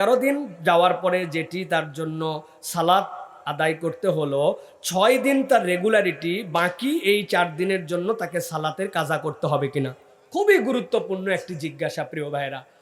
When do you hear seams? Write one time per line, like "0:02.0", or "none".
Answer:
none